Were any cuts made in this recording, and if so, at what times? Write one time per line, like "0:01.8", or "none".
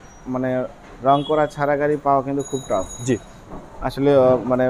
none